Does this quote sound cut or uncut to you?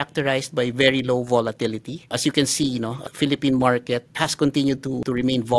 uncut